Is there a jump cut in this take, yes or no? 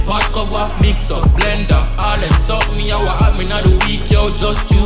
no